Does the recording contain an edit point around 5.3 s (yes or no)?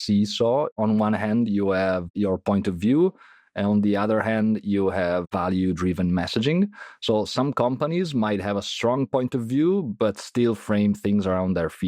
yes